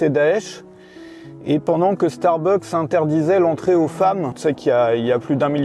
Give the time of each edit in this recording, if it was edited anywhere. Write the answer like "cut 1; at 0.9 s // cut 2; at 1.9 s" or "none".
cut 1; at 4.4 s

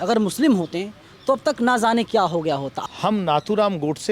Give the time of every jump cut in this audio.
cut 1; at 2.7 s

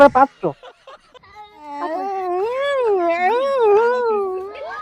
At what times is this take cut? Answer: cut 1; at 1.8 s

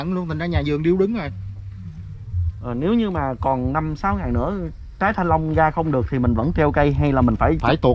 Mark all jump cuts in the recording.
none

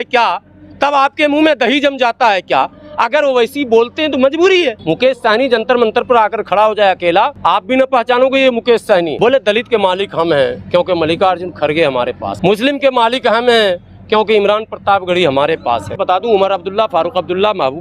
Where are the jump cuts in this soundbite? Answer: cut 1; at 4.8 s // cut 2; at 7.3 s // cut 3; at 9.1 s // cut 4; at 12.3 s // cut 5; at 16.0 s

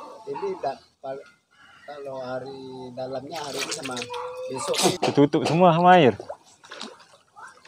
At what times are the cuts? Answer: cut 1; at 5.0 s

